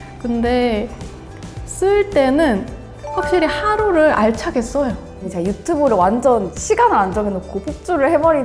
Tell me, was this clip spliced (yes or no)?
yes